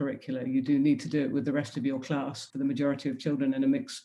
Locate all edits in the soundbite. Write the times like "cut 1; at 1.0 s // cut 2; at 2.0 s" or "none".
cut 1; at 2.5 s